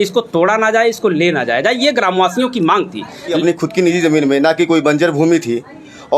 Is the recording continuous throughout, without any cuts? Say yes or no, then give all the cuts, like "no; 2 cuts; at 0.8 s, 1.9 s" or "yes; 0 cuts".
no; 1 cut; at 3.4 s